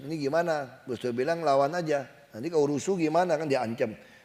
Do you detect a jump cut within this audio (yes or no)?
no